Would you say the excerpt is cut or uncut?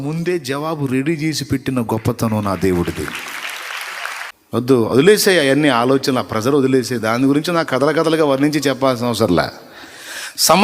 cut